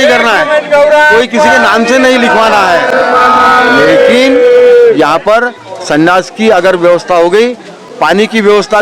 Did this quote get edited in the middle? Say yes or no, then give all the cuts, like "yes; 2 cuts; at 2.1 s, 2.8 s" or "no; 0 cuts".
no; 0 cuts